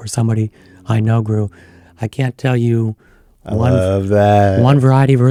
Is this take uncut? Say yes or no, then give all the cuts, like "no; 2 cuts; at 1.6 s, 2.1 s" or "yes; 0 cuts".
yes; 0 cuts